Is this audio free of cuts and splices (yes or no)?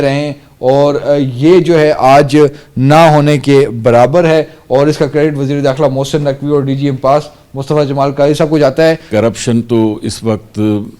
no